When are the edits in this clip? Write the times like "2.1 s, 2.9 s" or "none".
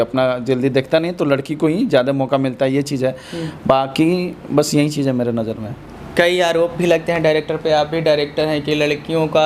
none